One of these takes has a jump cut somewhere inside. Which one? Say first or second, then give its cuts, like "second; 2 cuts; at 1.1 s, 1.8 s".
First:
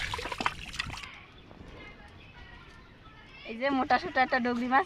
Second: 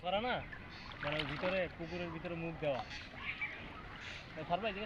first; 2 cuts; at 1.0 s, 3.5 s